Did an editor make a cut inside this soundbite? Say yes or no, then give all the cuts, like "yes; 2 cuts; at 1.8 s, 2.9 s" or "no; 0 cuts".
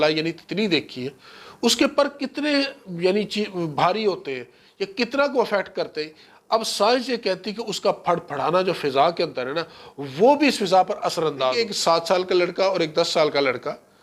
yes; 1 cut; at 11.5 s